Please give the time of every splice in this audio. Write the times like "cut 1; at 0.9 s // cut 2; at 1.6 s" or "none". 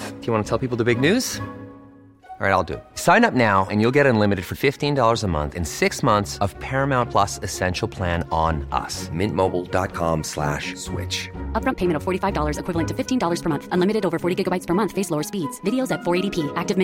none